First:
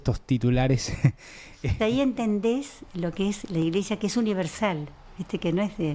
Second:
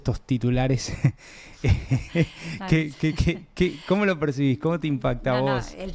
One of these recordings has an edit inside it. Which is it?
first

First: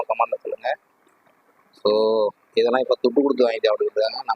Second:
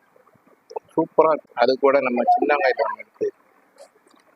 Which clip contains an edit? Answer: second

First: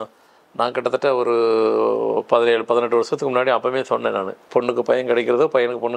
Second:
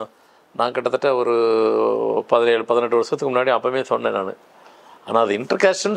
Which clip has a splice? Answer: first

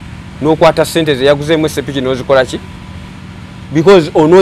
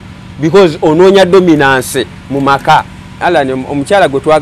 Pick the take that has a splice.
second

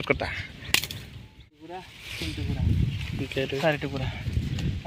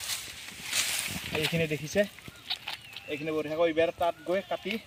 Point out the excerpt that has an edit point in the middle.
first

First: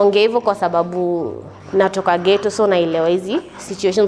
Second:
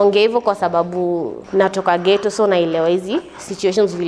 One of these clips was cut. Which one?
second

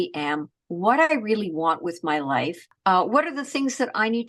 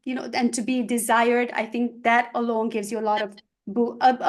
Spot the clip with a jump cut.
first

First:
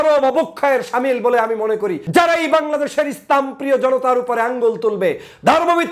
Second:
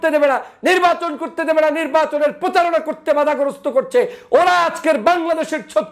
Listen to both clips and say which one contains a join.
first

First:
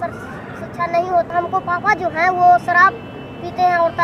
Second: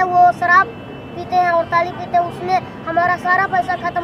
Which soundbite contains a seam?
first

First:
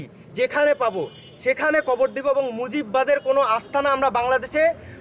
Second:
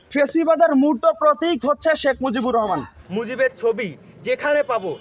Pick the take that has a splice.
second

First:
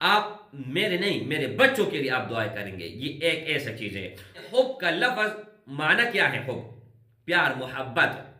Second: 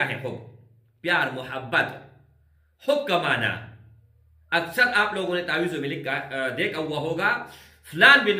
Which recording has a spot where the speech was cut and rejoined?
first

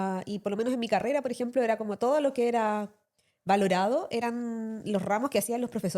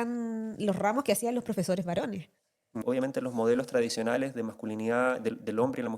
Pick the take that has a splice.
second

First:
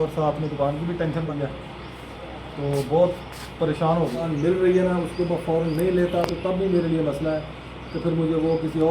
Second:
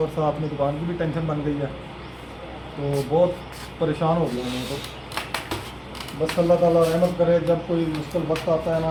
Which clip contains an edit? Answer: first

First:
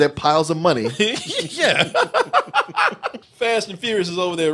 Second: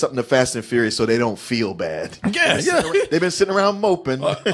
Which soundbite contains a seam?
first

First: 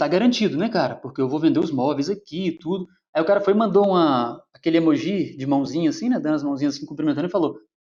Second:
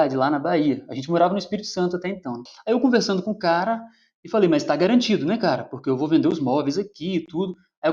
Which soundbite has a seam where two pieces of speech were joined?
second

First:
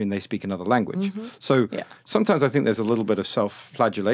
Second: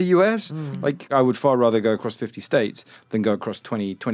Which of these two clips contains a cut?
second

